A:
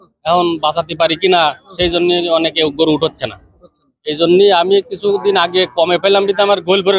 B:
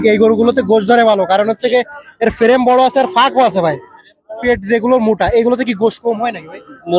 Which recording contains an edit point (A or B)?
B